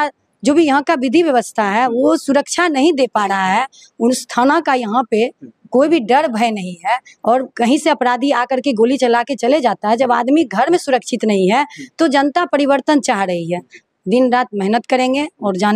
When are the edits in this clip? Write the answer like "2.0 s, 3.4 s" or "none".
13.7 s

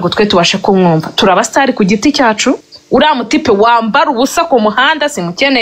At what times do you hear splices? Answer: 2.7 s

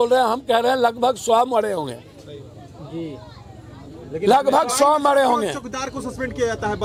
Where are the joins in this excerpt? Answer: none

